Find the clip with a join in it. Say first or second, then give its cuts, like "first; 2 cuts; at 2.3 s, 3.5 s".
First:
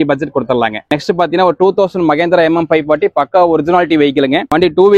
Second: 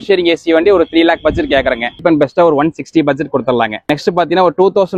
second; 1 cut; at 2.0 s